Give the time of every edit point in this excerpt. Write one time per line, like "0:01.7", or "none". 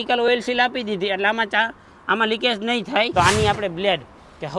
0:03.1